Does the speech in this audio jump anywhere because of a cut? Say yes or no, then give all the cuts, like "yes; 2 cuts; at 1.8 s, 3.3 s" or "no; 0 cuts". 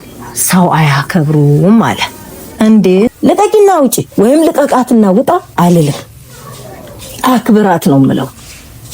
yes; 1 cut; at 3.1 s